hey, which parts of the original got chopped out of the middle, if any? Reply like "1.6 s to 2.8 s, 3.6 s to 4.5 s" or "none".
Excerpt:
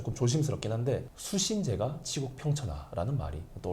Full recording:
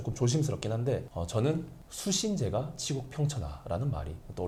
1.1 s to 1.9 s